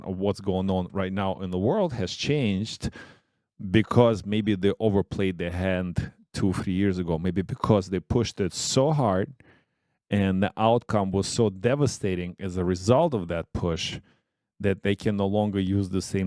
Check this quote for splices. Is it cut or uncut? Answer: uncut